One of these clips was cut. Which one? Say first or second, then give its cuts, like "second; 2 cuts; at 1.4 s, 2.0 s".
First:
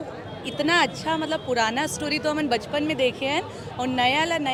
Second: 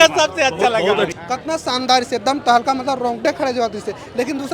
second; 1 cut; at 1.1 s